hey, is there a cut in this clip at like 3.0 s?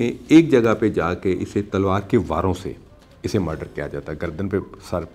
no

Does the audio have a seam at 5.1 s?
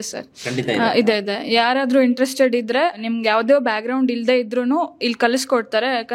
no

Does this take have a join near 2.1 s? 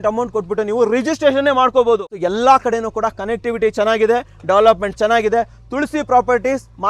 yes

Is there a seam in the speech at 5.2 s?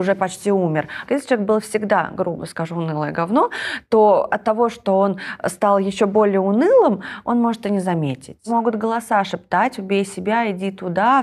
no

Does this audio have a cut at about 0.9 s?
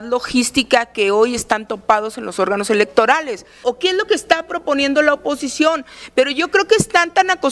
no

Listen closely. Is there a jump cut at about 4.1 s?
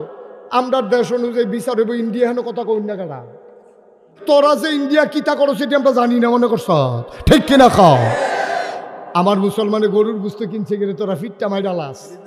yes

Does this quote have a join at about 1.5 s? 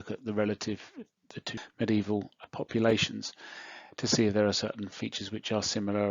yes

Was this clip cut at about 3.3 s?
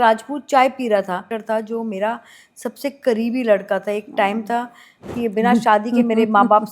no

